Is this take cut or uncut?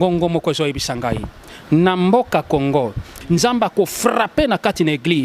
cut